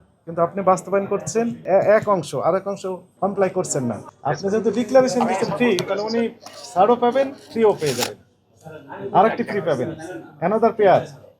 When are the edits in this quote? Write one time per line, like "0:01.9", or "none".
0:01.6
0:03.1
0:04.1